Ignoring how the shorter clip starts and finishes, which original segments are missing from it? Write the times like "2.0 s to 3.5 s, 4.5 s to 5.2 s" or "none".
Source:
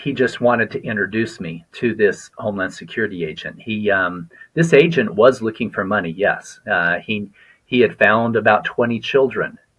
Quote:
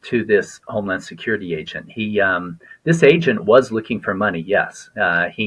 none